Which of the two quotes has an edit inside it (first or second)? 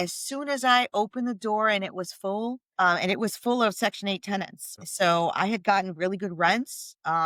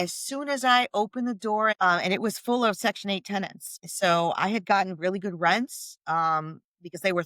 second